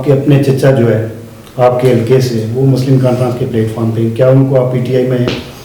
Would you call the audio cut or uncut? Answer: uncut